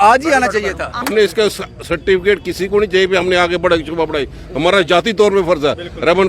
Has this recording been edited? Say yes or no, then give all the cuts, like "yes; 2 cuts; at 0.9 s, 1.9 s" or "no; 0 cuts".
yes; 1 cut; at 0.9 s